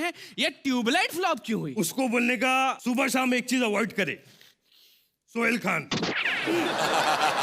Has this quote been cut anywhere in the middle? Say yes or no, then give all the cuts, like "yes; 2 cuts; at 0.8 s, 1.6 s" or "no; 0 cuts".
yes; 2 cuts; at 1.7 s, 2.8 s